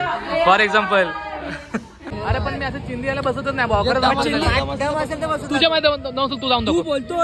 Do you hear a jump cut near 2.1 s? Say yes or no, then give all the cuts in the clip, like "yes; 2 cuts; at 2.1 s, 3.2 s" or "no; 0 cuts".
yes; 1 cut; at 2.1 s